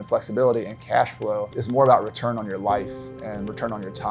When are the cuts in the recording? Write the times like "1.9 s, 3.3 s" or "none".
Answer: 1.6 s